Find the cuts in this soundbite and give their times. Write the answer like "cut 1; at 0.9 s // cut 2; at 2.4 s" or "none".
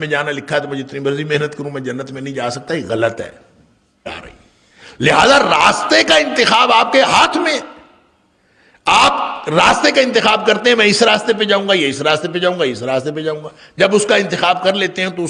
cut 1; at 4.1 s